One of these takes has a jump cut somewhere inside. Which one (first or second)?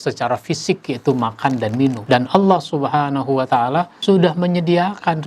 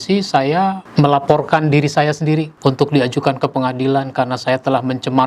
first